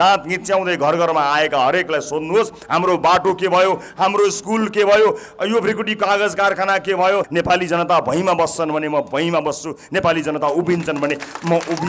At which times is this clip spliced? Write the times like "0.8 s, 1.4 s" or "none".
7.3 s